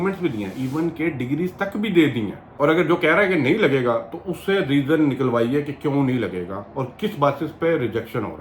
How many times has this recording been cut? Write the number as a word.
one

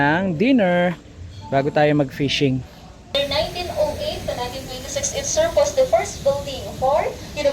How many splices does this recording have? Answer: one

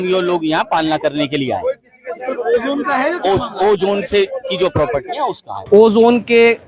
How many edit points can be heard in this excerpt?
one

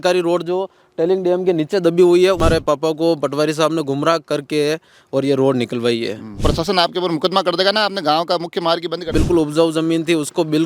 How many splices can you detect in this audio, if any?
three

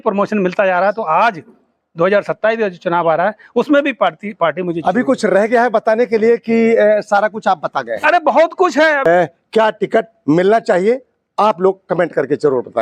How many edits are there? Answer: one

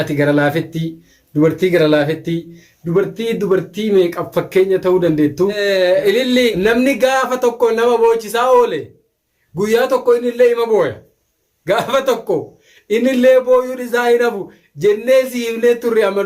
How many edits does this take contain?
two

